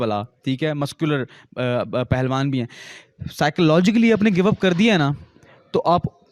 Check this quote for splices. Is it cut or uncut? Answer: uncut